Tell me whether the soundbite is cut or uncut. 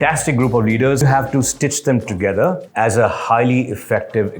cut